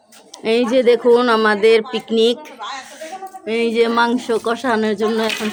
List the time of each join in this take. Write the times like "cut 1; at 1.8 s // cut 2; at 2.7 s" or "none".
none